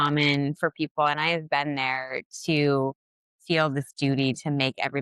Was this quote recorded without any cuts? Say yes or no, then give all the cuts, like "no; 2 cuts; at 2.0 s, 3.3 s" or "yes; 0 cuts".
yes; 0 cuts